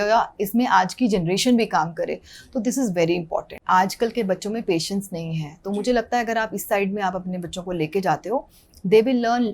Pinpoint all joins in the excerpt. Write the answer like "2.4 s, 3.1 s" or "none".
3.5 s